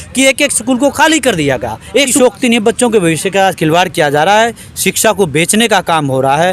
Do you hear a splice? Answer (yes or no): yes